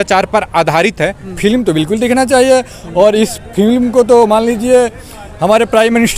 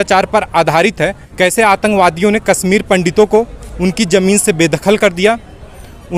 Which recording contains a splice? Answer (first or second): first